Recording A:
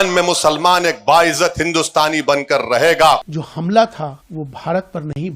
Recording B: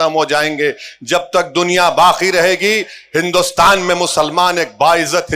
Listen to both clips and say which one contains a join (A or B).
A